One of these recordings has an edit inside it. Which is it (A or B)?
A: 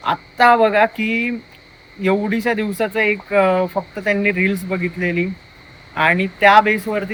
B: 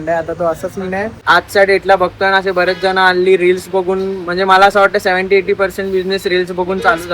B